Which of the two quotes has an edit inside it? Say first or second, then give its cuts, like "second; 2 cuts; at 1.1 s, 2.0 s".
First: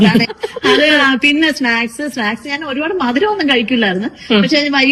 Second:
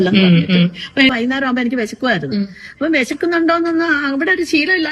second; 1 cut; at 1.1 s